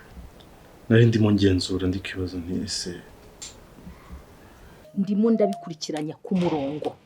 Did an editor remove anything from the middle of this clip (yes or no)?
yes